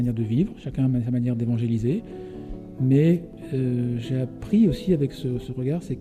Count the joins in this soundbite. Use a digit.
0